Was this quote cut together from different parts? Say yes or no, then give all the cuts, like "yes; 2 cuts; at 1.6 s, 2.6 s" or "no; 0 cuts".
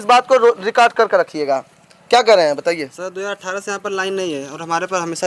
no; 0 cuts